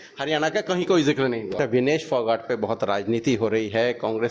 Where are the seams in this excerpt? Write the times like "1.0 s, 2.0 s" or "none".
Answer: 1.5 s